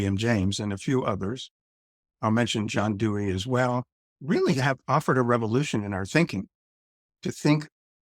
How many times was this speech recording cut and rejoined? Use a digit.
0